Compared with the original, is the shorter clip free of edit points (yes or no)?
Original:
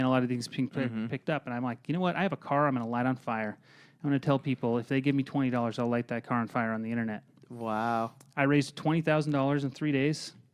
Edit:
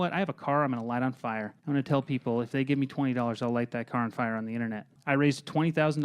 no